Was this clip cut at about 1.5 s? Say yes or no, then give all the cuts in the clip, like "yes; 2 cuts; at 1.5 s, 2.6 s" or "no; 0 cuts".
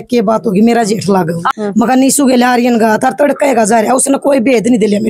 yes; 1 cut; at 1.5 s